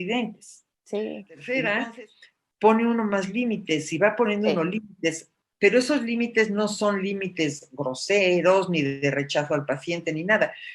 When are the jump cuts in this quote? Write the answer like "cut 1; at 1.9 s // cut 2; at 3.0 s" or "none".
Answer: cut 1; at 1.4 s